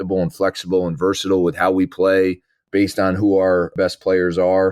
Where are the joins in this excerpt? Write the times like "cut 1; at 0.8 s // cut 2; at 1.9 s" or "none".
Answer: cut 1; at 2.6 s // cut 2; at 3.7 s